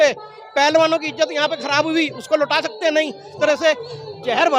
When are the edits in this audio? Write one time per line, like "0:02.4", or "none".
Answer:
0:03.3